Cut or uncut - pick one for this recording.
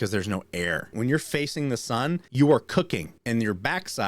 cut